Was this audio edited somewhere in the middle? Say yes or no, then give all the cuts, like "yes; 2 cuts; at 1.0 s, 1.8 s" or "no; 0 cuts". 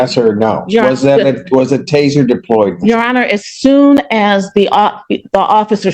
no; 0 cuts